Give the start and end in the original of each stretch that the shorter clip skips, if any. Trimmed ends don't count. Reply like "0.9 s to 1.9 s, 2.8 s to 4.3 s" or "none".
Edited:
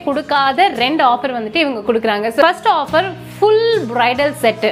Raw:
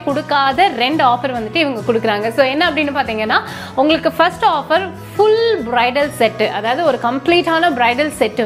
2.4 s to 4.2 s